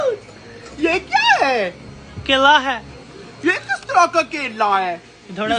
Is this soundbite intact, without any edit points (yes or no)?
yes